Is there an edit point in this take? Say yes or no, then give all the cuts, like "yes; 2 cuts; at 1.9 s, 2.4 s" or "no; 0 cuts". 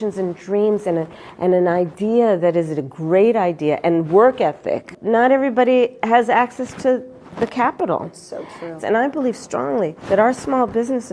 yes; 2 cuts; at 4.9 s, 10.0 s